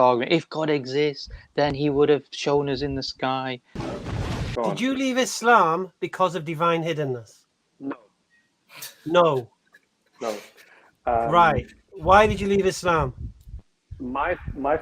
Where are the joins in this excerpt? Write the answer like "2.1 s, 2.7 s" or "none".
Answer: 3.9 s